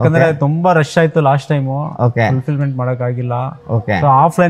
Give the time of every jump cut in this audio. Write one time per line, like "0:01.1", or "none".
none